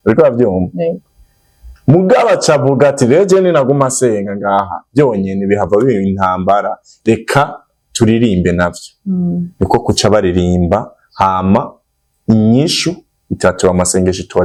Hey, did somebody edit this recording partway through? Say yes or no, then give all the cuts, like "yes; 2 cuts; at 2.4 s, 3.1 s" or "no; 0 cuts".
no; 0 cuts